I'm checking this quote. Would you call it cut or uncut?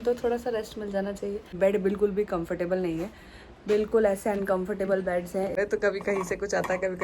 cut